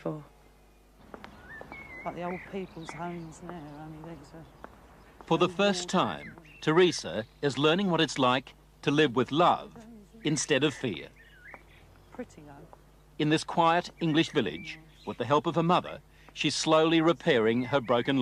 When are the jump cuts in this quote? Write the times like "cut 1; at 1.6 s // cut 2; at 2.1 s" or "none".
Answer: none

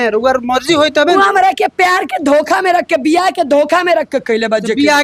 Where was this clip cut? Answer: none

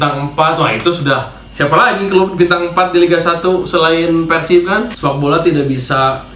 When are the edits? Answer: cut 1; at 4.9 s

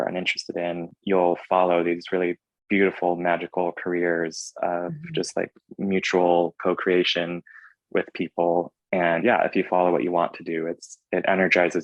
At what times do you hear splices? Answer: cut 1; at 8.7 s

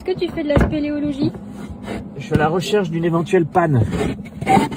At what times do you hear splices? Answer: none

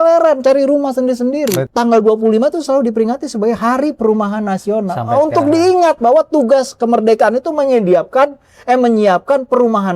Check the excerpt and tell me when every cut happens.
cut 1; at 1.7 s

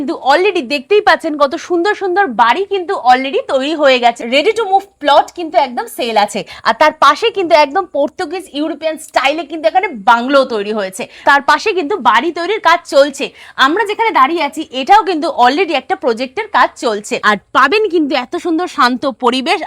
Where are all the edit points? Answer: cut 1; at 4.2 s // cut 2; at 11.2 s // cut 3; at 17.1 s

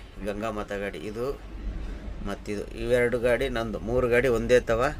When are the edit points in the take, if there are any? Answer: none

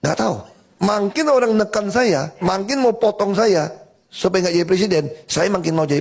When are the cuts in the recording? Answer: none

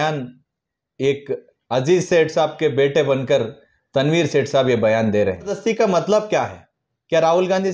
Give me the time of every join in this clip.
cut 1; at 5.6 s

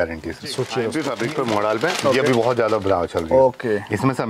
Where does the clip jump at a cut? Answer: cut 1; at 0.9 s

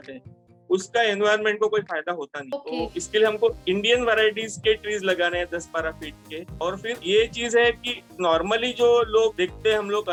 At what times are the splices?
none

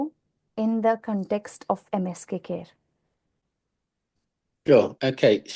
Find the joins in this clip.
none

